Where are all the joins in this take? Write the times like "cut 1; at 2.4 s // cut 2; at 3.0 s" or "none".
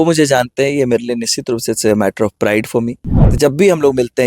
cut 1; at 3.2 s